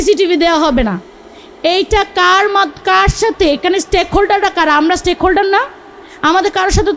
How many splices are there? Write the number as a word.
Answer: zero